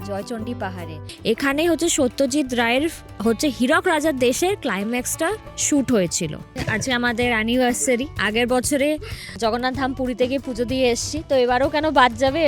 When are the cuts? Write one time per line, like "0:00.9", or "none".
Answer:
0:01.1
0:06.6